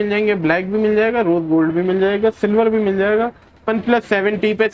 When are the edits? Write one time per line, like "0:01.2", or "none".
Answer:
0:03.7